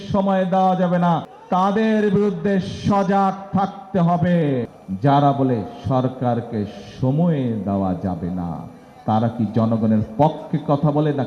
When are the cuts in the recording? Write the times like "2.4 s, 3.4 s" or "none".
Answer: 1.3 s, 4.8 s